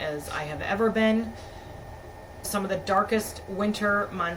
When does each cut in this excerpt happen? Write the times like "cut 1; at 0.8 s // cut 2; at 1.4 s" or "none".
cut 1; at 2.4 s